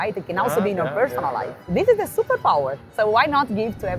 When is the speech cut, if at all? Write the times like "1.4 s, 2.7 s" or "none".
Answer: 1.7 s, 2.9 s